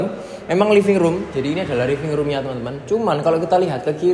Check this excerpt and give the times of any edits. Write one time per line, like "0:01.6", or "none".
none